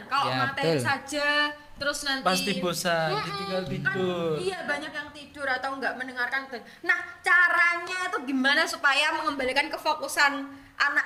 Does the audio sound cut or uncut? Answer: uncut